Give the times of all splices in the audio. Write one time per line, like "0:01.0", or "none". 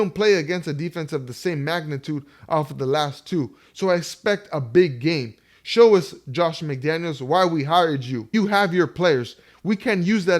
0:08.1

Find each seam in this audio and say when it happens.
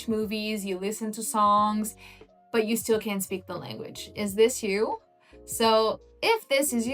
none

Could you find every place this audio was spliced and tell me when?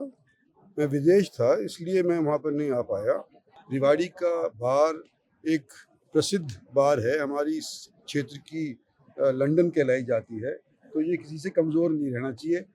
0:03.5

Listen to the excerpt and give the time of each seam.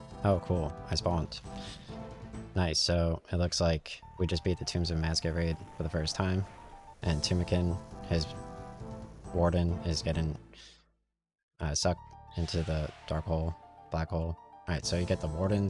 none

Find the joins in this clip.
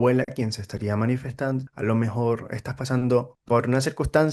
0:01.7
0:03.3

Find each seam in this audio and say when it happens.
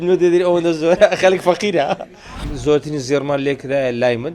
0:02.3

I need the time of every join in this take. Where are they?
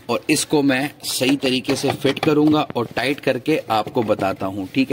none

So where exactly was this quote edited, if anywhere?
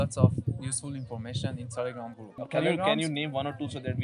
0:02.3

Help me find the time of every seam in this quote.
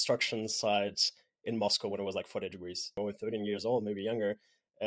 0:02.9

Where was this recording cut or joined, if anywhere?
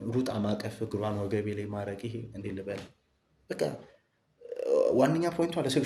none

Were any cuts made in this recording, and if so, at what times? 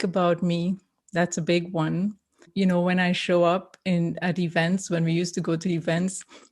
0:02.5

